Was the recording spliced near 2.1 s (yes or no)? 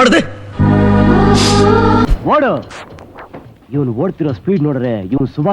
yes